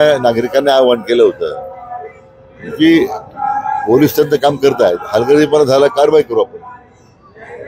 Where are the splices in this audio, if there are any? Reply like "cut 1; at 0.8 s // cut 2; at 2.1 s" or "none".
none